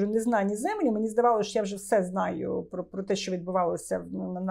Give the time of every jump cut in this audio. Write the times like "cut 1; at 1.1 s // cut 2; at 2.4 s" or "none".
none